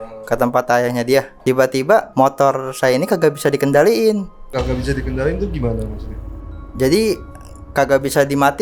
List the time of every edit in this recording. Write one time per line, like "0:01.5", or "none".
0:01.3
0:02.1
0:04.4